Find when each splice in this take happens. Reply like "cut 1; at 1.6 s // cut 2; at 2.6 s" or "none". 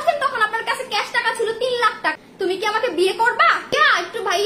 cut 1; at 1.8 s // cut 2; at 3.7 s

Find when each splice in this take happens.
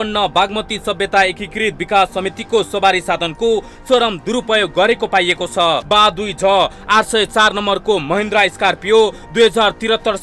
cut 1; at 5.8 s

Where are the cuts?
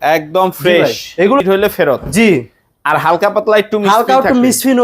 cut 1; at 1.4 s

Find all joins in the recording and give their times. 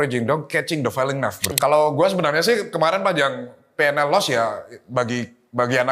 cut 1; at 1.5 s

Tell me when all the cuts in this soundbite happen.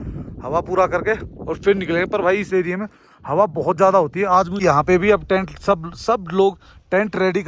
cut 1; at 4.5 s

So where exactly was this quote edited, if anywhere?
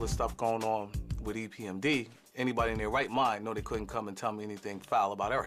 cut 1; at 2.8 s

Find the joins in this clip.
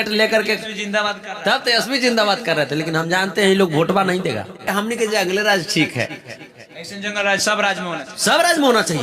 cut 1; at 4.7 s

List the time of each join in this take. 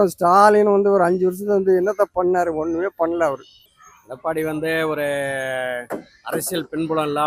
cut 1; at 3.5 s

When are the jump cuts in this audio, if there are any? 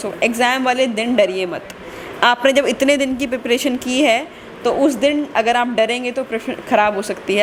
none

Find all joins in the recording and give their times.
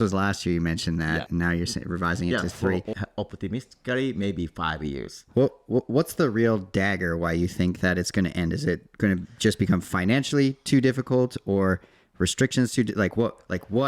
cut 1; at 1.3 s // cut 2; at 3.0 s

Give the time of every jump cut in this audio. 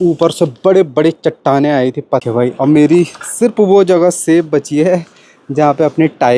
cut 1; at 2.3 s

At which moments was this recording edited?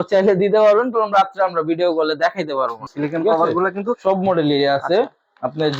cut 1; at 2.8 s

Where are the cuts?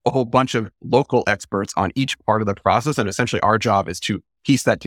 none

